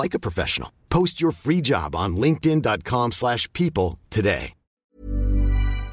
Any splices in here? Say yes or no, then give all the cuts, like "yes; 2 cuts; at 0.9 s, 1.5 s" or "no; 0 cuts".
yes; 1 cut; at 4.6 s